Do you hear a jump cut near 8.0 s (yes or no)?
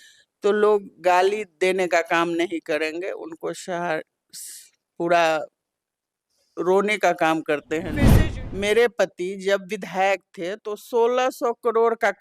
yes